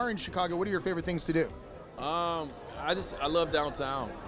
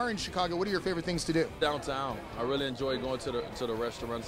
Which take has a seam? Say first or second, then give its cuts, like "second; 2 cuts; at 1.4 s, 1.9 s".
second; 1 cut; at 1.6 s